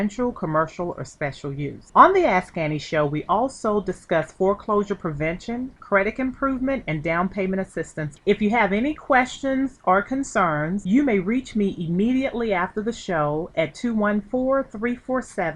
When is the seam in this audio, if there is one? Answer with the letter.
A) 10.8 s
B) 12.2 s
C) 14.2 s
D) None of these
A